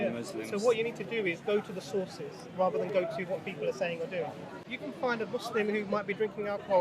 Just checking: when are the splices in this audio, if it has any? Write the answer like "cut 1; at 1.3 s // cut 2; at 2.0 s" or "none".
cut 1; at 4.8 s